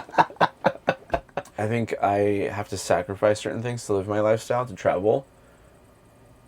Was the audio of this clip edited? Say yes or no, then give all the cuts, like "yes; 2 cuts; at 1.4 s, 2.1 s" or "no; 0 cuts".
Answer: yes; 1 cut; at 1.4 s